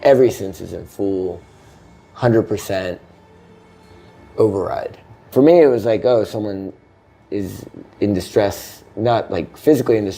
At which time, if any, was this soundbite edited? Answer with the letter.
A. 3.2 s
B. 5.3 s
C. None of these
B